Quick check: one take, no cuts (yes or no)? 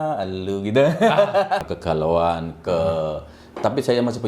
no